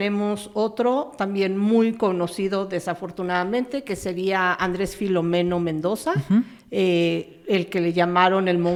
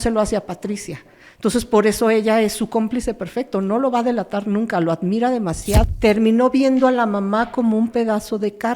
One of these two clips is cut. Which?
second; 1 cut; at 5.8 s

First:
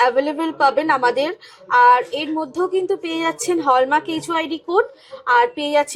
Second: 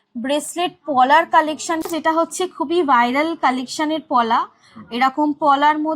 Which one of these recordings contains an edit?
second; 1 cut; at 1.8 s

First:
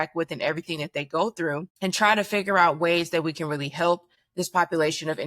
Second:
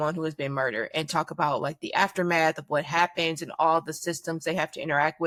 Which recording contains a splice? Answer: first; 2 cuts; at 1.7 s, 4.2 s

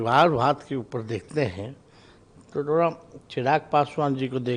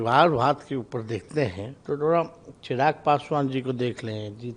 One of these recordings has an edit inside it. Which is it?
second; 1 cut; at 1.7 s

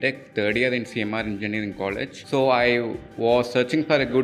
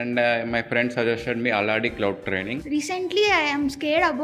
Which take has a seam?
second; 1 cut; at 2.6 s

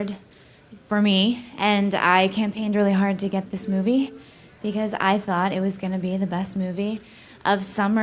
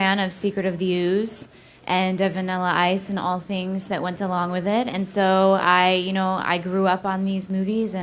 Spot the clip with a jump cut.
second; 1 cut; at 4.4 s

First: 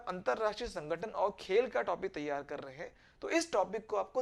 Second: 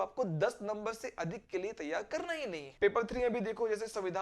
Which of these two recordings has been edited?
second; 1 cut; at 2.6 s

